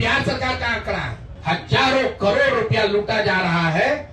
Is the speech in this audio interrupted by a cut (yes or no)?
yes